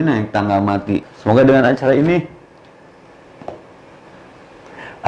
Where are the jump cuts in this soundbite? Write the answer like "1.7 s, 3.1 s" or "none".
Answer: 1.0 s